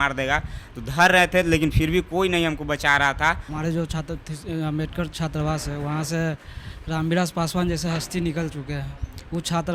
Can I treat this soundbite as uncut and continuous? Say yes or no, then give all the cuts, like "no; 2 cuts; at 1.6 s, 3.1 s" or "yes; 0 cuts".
no; 1 cut; at 3.5 s